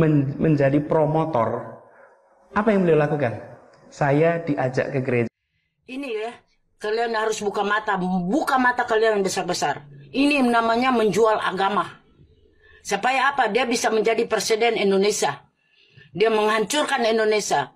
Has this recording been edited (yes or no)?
yes